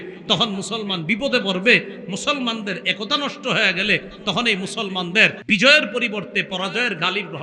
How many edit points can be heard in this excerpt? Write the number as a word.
one